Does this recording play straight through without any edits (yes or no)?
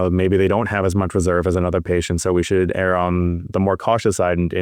no